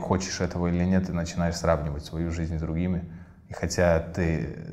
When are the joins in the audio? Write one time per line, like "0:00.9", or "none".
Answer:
none

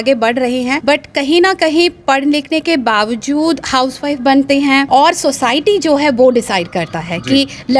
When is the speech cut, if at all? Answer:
0:00.8
0:04.9

